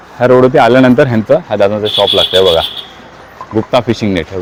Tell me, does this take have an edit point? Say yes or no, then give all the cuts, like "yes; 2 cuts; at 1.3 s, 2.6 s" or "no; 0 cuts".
no; 0 cuts